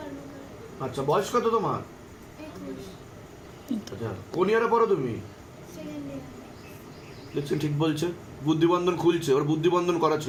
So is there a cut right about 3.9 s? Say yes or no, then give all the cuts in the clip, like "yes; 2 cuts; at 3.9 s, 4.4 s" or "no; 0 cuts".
no; 0 cuts